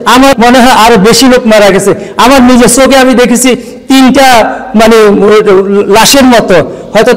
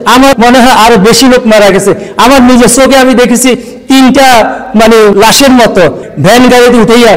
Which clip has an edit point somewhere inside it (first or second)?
second